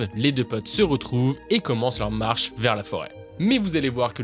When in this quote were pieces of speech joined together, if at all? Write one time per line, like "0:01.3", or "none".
0:03.2